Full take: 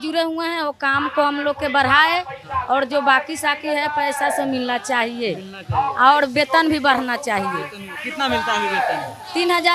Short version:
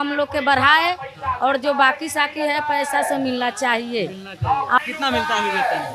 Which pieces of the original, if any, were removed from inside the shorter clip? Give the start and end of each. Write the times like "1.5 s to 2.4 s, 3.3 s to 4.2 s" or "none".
6.1 s to 8.0 s